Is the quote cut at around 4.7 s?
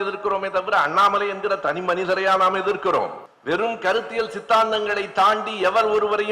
no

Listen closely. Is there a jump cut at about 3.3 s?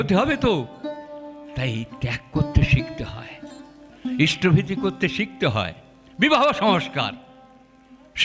no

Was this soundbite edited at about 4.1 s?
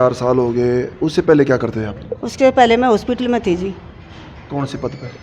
no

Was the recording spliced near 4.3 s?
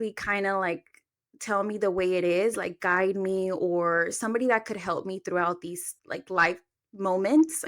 no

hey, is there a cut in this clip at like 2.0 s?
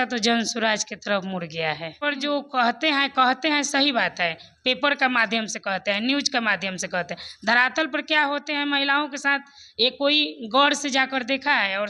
yes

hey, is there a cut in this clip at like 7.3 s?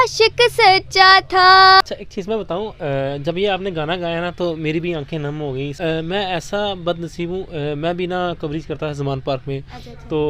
no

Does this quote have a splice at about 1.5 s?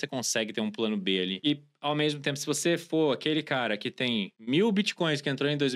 yes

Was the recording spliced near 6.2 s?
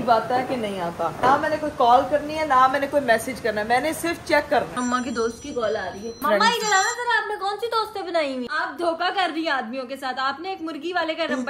yes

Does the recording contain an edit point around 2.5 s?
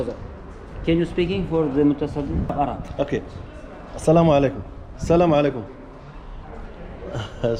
yes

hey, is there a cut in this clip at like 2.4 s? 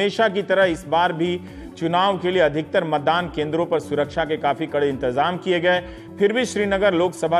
no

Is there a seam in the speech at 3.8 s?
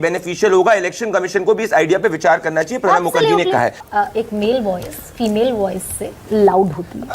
yes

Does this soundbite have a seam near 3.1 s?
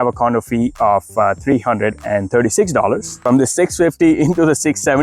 yes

